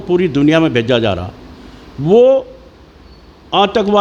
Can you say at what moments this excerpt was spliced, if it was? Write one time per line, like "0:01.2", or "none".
0:02.1